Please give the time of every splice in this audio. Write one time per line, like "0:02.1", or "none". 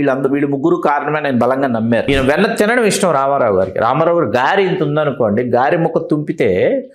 0:02.1

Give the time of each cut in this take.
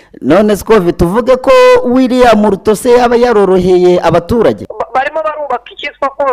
0:04.7

